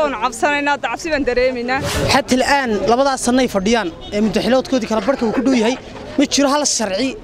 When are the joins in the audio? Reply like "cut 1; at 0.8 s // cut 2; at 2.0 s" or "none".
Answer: cut 1; at 1.9 s